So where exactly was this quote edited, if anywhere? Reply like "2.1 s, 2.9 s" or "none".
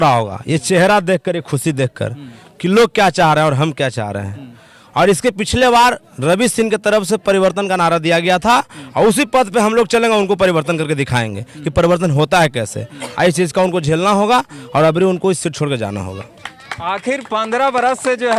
none